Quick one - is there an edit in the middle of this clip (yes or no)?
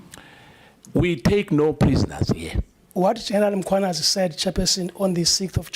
yes